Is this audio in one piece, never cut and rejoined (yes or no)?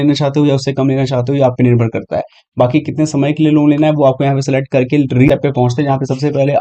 no